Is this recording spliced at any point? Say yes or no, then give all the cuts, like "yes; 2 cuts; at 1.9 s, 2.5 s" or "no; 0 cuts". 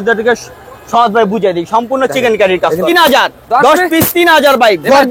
yes; 1 cut; at 2.8 s